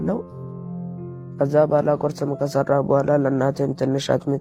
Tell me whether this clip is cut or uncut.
uncut